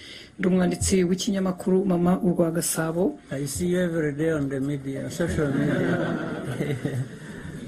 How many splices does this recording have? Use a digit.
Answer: 0